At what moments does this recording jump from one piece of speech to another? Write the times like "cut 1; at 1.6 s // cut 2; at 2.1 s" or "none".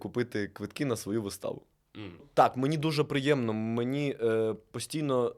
cut 1; at 2.3 s

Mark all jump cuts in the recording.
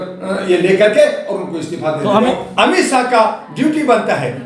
cut 1; at 2.2 s

